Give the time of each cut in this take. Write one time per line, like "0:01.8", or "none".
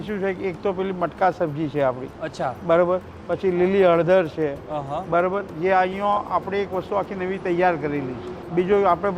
none

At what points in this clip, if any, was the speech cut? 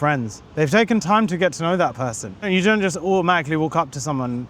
0:02.5

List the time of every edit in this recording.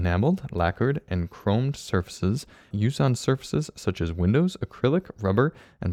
0:02.7

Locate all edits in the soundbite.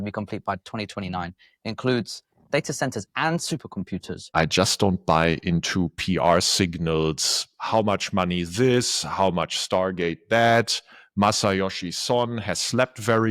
0:04.3

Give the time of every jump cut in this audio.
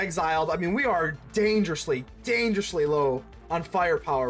0:03.3

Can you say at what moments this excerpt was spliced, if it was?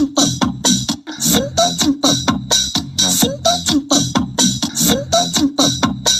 0:01.0
0:04.5

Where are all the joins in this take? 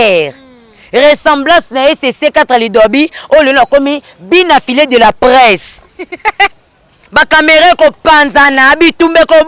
0:06.5

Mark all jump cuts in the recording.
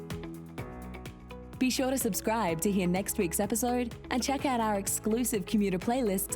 0:01.5

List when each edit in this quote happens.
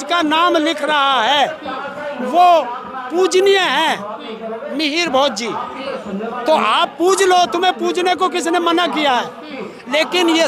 none

